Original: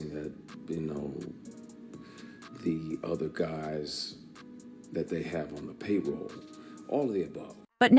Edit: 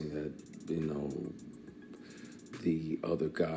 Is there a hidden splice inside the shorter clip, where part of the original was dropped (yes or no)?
no